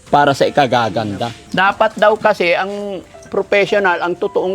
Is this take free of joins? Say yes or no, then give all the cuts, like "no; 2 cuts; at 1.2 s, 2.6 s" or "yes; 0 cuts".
no; 1 cut; at 1.4 s